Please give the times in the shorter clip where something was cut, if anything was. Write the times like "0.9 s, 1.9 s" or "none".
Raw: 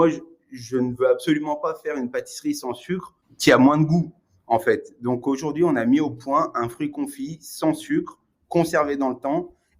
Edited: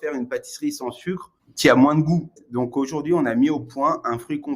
2.4 s